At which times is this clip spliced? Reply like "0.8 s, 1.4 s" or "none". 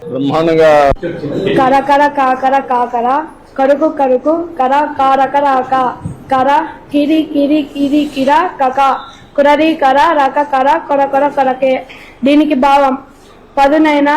0.9 s

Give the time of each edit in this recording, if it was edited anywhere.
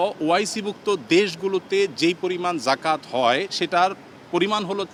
none

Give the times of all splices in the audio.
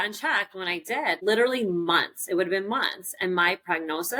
none

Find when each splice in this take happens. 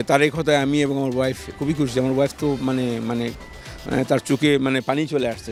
none

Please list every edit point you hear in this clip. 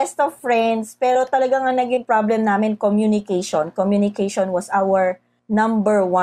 5.3 s

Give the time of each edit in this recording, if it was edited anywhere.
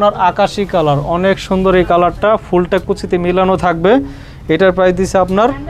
none

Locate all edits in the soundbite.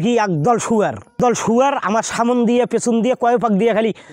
1.2 s

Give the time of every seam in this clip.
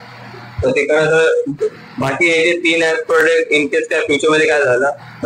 1.5 s

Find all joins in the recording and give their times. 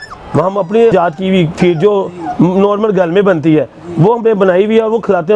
0.9 s

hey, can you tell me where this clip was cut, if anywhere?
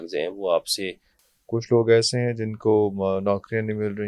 1.1 s

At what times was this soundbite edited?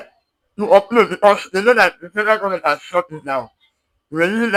none

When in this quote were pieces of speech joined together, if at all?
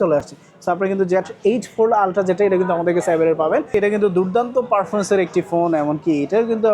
3.7 s

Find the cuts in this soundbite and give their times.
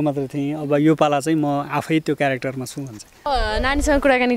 3.3 s

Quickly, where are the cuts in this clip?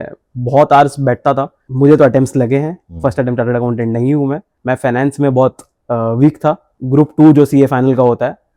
1.6 s, 4.5 s, 6.7 s

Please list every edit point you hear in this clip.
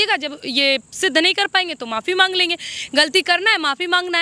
none

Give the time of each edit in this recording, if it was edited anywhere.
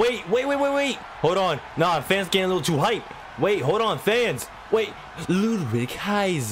none

